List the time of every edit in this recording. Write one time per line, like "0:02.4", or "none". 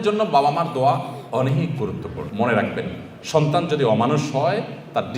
0:02.3